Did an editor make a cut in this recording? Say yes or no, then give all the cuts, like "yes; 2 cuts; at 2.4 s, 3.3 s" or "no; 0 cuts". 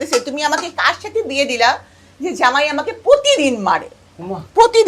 no; 0 cuts